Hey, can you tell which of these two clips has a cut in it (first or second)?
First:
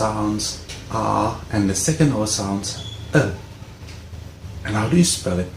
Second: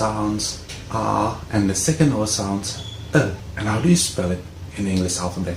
second